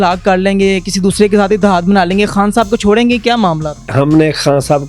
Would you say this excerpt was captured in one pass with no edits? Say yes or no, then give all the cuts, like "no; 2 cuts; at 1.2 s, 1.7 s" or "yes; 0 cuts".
no; 1 cut; at 3.9 s